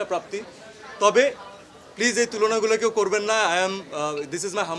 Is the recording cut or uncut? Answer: uncut